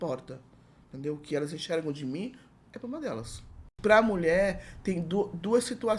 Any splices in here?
yes; 1 cut; at 3.7 s

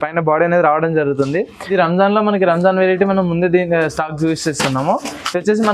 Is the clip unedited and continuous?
no; 1 cut; at 1.7 s

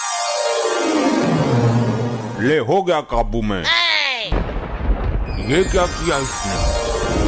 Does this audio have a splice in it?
yes; 2 cuts; at 1.2 s, 4.3 s

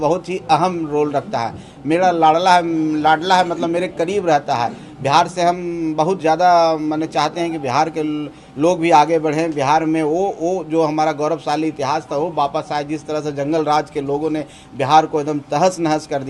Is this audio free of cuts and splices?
yes; 0 cuts

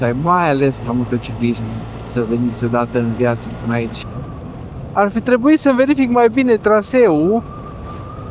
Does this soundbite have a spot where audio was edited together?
yes; 1 cut; at 4.1 s

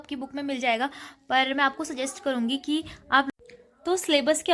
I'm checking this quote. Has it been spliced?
yes; 1 cut; at 3.3 s

